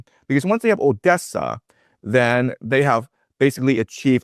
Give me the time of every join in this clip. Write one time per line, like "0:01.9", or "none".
none